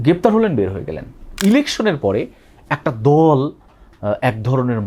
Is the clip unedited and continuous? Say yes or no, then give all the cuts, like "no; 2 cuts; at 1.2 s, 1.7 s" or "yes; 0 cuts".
no; 1 cut; at 1.3 s